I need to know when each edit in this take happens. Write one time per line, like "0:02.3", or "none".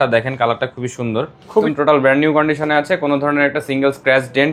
0:01.7